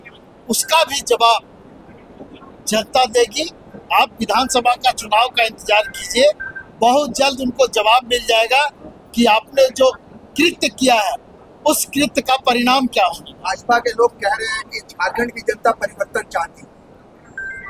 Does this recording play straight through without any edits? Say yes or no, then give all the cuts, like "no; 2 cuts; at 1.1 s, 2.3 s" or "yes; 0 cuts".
yes; 0 cuts